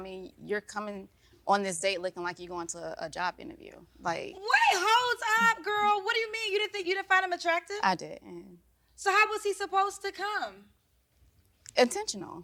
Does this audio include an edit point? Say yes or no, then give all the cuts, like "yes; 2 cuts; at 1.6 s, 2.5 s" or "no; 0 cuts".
no; 0 cuts